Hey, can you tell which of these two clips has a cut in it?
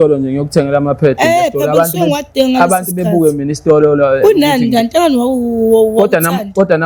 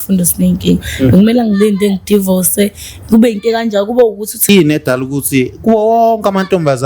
second; 1 cut; at 4.5 s

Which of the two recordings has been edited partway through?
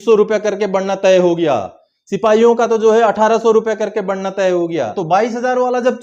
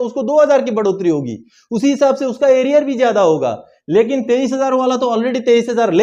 first; 1 cut; at 5.0 s

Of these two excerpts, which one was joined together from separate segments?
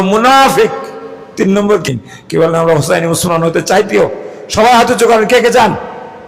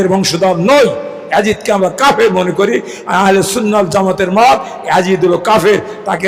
first; 1 cut; at 1.8 s

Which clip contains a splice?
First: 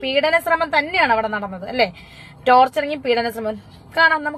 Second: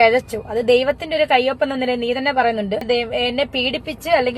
second; 1 cut; at 2.8 s

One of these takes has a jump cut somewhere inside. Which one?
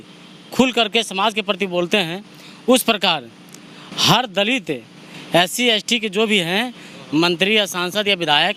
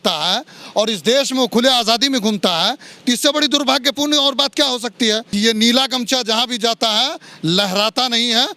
second; 1 cut; at 5.2 s

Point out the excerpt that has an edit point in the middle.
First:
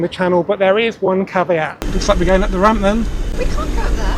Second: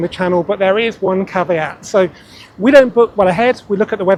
first; 2 cuts; at 1.8 s, 3.3 s

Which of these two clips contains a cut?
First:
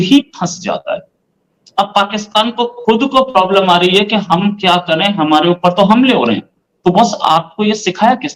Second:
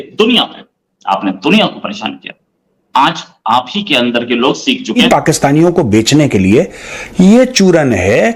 second; 1 cut; at 5.0 s

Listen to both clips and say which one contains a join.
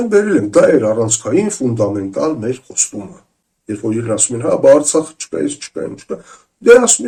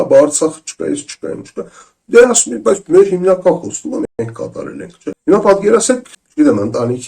second; 2 cuts; at 5.2 s, 6.2 s

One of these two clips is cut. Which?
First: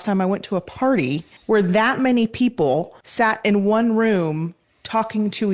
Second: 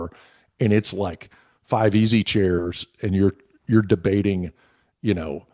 first; 2 cuts; at 1.3 s, 3.0 s

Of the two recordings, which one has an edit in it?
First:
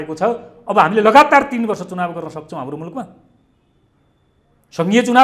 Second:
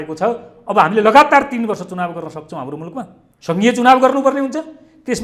second; 1 cut; at 3.2 s

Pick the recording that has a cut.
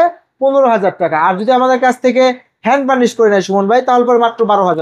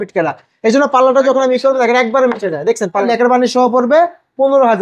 second; 1 cut; at 3.1 s

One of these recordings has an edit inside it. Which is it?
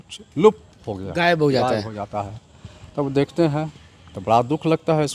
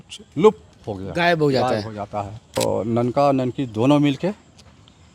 second; 1 cut; at 2.6 s

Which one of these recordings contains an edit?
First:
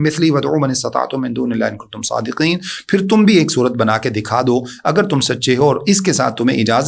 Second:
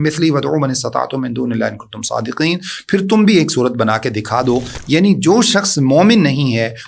second; 1 cut; at 4.7 s

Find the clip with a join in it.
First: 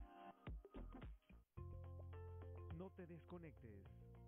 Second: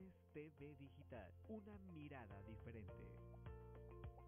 first; 1 cut; at 1.4 s

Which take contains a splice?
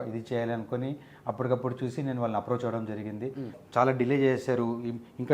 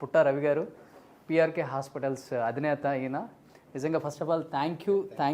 first; 1 cut; at 3.5 s

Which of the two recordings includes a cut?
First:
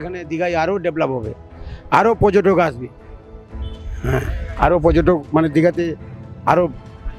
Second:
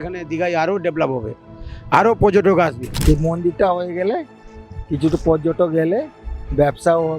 second; 1 cut; at 2.9 s

